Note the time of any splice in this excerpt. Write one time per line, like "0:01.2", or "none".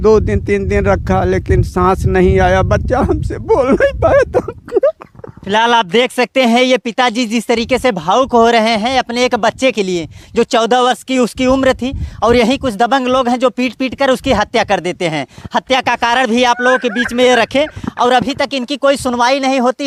none